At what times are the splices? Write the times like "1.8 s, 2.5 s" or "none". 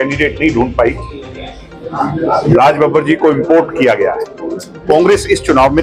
none

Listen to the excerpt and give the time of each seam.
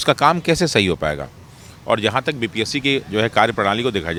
none

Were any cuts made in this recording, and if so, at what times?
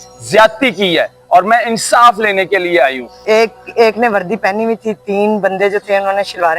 3.1 s

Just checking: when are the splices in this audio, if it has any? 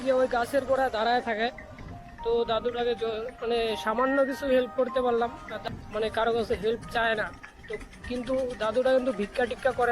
5.7 s

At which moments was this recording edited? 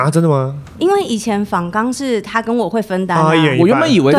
none

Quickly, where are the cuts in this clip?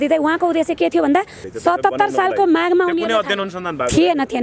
1.4 s

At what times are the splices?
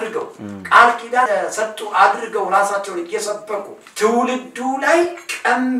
1.3 s, 3.8 s

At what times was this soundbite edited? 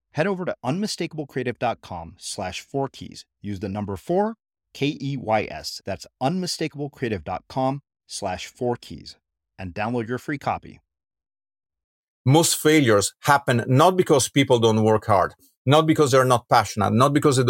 12.1 s

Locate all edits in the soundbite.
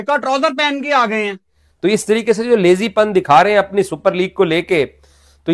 2.0 s

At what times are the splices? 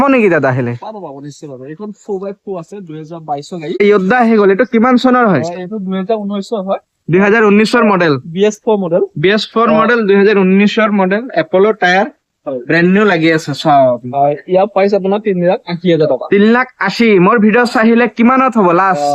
3.8 s

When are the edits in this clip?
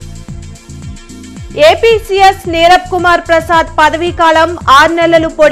1.0 s

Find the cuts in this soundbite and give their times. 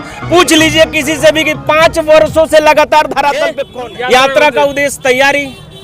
3.6 s

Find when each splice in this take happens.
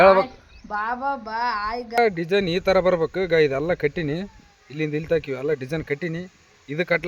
2.0 s

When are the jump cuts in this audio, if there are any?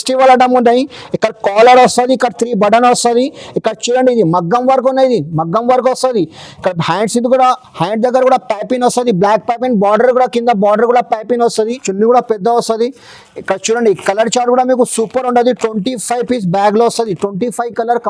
11.7 s

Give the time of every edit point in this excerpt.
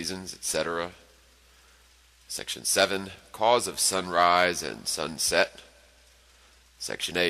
none

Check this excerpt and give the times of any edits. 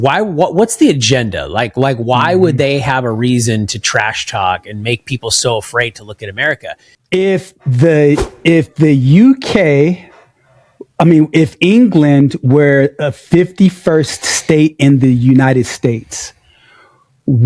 6.9 s

